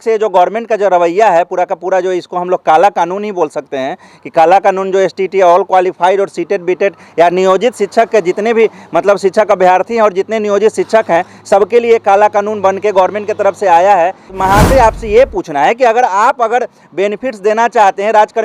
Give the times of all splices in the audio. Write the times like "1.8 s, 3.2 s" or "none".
14.3 s